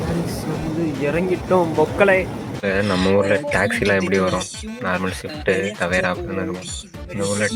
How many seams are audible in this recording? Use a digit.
1